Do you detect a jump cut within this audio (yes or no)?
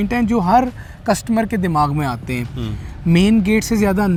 no